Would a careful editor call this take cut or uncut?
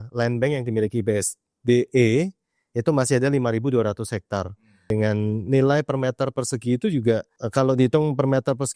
cut